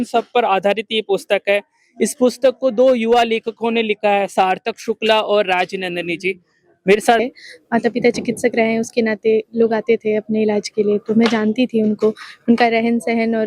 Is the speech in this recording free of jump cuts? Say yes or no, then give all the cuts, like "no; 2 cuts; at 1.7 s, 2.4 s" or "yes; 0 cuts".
no; 1 cut; at 7.2 s